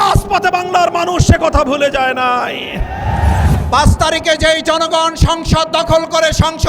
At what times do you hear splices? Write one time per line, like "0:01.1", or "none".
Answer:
0:03.5